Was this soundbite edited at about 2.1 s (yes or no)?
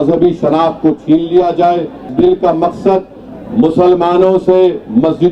yes